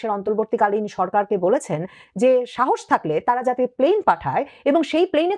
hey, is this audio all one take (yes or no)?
yes